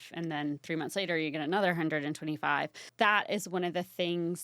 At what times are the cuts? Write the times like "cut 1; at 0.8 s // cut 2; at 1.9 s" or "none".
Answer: cut 1; at 2.8 s